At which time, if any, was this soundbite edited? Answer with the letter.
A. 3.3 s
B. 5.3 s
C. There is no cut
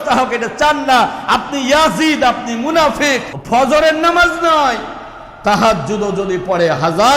A